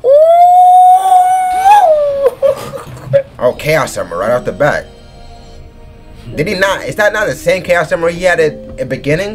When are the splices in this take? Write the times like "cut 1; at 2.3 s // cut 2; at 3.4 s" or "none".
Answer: cut 1; at 3.3 s